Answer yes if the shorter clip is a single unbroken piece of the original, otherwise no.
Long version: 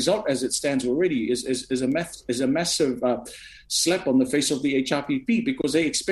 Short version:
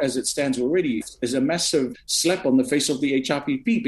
no